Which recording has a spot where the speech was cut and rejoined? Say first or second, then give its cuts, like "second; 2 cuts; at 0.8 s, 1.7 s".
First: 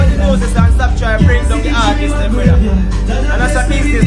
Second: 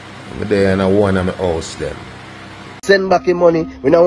second; 1 cut; at 2.7 s